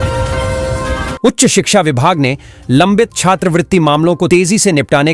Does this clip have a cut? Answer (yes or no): yes